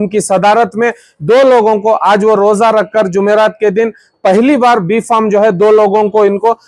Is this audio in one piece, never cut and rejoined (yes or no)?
yes